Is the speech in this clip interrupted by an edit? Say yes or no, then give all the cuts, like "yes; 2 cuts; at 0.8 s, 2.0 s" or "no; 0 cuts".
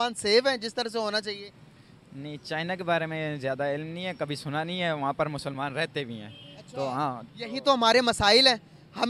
no; 0 cuts